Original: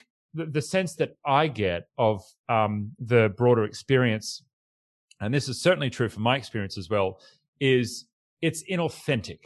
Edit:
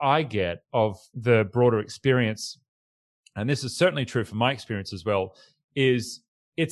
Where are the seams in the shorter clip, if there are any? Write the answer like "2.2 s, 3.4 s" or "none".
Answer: 1.1 s